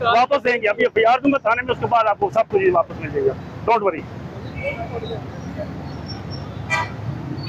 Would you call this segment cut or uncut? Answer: uncut